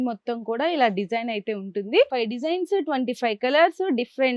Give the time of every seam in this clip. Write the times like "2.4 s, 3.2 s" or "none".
2.2 s